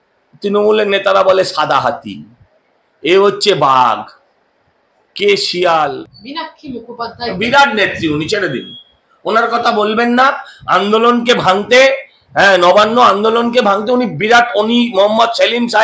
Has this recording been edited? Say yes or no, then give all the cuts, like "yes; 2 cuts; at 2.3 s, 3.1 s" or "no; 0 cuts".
yes; 1 cut; at 6.0 s